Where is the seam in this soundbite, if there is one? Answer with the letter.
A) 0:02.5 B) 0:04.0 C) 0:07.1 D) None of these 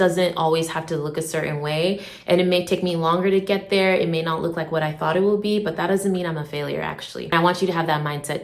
C